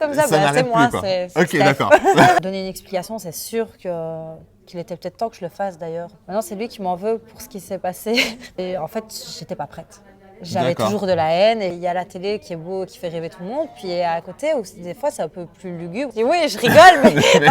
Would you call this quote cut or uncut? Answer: cut